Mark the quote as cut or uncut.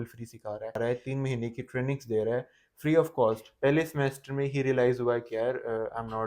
cut